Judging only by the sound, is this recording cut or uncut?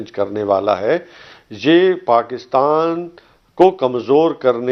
uncut